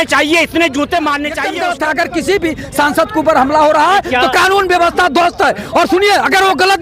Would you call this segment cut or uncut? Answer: cut